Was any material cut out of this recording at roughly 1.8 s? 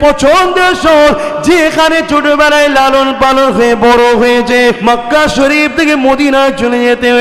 no; 1 cut; at 4.8 s

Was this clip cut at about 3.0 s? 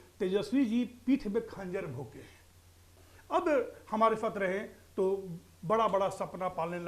yes; 1 cut; at 3.0 s

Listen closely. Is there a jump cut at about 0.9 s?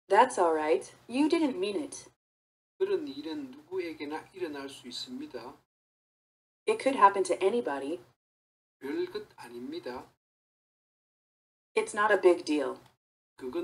yes; 1 cut; at 0.9 s

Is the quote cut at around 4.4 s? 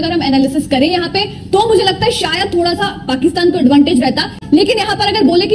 yes; 1 cut; at 4.4 s

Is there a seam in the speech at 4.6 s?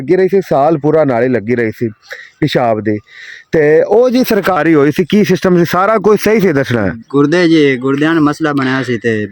yes; 1 cut; at 4.6 s

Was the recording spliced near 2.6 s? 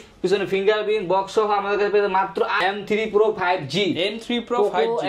yes; 1 cut; at 2.6 s

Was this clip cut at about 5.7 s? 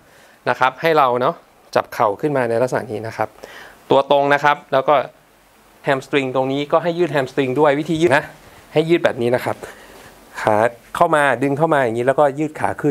yes; 2 cuts; at 5.7 s, 8.1 s

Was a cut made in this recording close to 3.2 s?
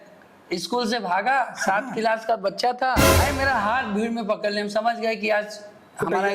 yes; 1 cut; at 3.2 s

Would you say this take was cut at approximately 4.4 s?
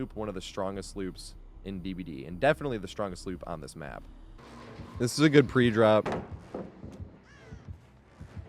yes; 1 cut; at 4.4 s

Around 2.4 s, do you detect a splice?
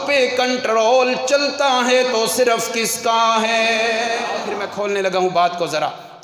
no; 1 cut; at 4.5 s

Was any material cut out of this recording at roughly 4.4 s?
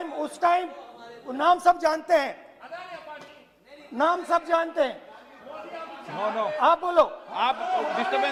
no; 0 cuts

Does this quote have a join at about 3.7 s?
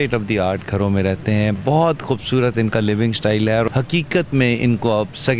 yes; 2 cuts; at 1.6 s, 3.7 s

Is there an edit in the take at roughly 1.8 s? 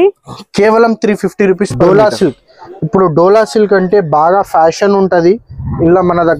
yes; 1 cut; at 1.8 s

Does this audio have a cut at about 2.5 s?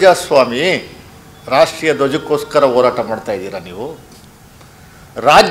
no; 0 cuts

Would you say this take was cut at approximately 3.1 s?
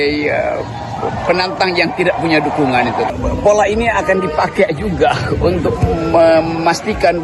yes; 1 cut; at 3.1 s

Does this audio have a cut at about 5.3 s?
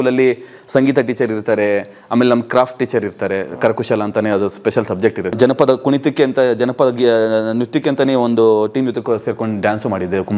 yes; 1 cut; at 5.3 s

